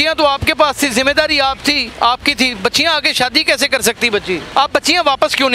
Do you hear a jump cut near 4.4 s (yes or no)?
yes